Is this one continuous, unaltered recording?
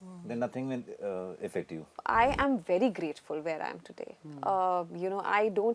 no; 1 cut; at 1.9 s

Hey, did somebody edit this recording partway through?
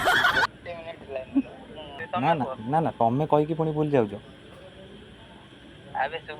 yes; 1 cut; at 2.0 s

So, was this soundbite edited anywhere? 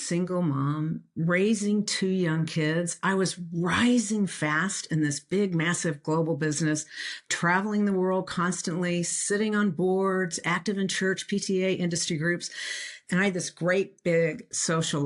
no; 0 cuts

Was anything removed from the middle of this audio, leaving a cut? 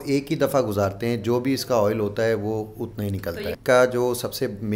yes; 1 cut; at 3.5 s

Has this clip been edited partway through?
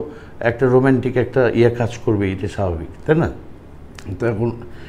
no; 0 cuts

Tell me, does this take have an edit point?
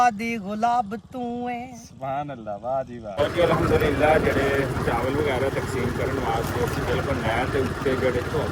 yes; 1 cut; at 3.1 s

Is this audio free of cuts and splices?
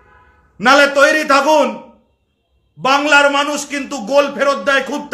yes; 0 cuts

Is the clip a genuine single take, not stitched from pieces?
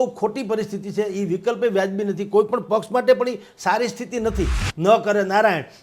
no; 1 cut; at 4.6 s

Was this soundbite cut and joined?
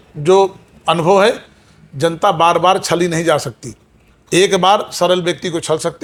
no; 0 cuts

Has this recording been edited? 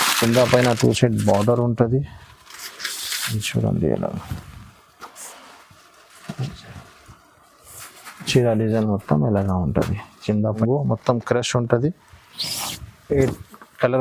yes; 1 cut; at 10.6 s

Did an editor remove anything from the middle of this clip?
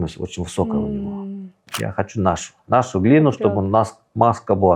yes; 1 cut; at 1.7 s

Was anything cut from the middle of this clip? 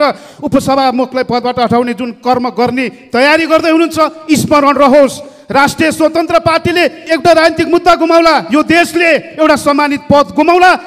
yes; 1 cut; at 7.0 s

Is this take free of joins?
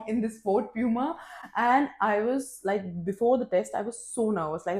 yes; 0 cuts

